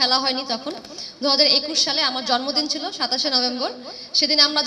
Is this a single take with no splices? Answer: yes; 0 cuts

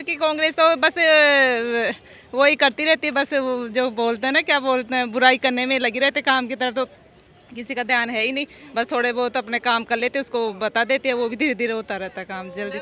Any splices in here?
no; 0 cuts

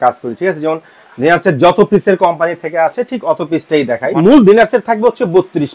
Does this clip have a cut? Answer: yes; 1 cut; at 4.1 s

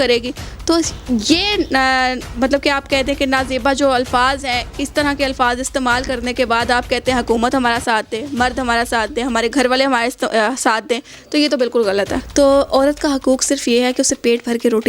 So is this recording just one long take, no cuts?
no; 1 cut; at 12.2 s

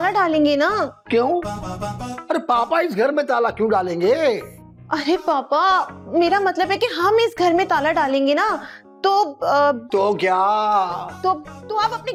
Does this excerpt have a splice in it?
no; 0 cuts

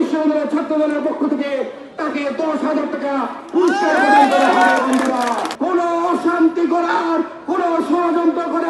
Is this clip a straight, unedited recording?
no; 1 cut; at 5.5 s

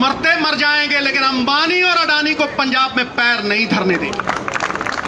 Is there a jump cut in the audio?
no; 0 cuts

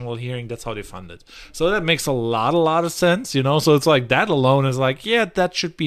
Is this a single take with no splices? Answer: yes; 0 cuts

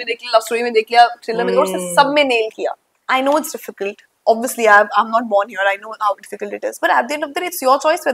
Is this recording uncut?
no; 1 cut; at 3.0 s

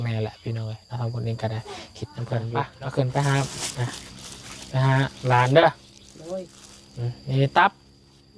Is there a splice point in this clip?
yes; 1 cut; at 2.7 s

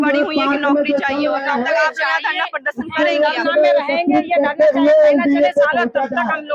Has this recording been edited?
no; 0 cuts

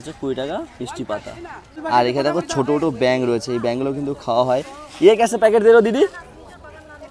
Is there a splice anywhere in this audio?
no; 0 cuts

